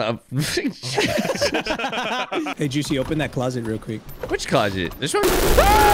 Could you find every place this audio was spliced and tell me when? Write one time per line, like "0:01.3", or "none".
0:02.5